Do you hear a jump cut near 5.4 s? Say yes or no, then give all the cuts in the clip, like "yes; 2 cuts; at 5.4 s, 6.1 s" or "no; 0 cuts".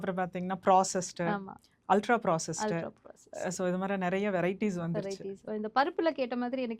yes; 1 cut; at 5.4 s